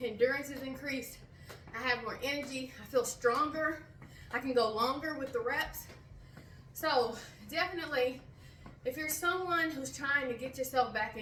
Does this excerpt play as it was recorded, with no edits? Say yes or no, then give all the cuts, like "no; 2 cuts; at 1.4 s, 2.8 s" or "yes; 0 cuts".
yes; 0 cuts